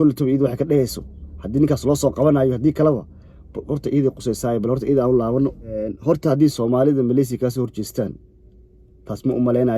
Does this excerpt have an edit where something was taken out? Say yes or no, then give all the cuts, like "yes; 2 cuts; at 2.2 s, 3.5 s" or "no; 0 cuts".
yes; 1 cut; at 5.9 s